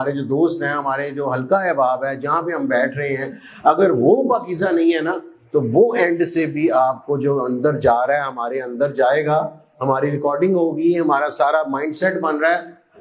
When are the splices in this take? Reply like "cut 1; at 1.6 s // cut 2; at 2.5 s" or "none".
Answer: none